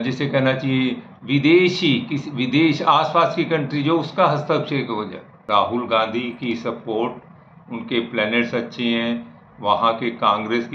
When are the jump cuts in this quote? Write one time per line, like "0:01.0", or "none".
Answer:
0:05.4